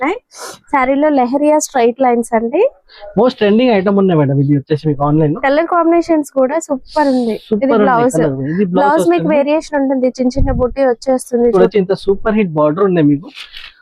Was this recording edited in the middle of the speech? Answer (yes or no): yes